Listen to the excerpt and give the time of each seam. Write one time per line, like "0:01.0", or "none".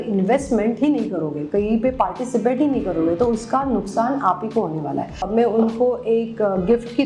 0:05.2